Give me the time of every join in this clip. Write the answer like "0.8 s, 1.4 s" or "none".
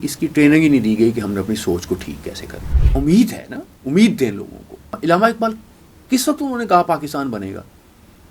2.8 s, 4.9 s